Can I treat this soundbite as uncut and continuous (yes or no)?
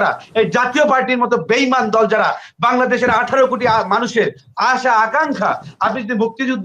yes